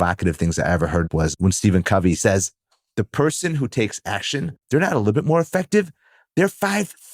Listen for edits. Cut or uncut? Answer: cut